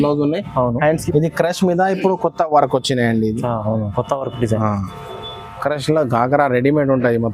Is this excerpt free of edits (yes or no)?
no